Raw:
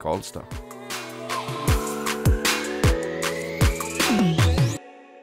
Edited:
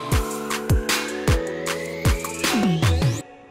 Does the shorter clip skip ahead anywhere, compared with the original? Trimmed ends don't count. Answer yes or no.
no